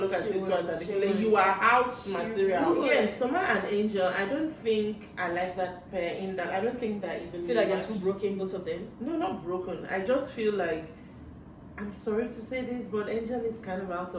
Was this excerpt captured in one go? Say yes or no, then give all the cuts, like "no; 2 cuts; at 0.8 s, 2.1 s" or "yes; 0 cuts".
no; 1 cut; at 2.9 s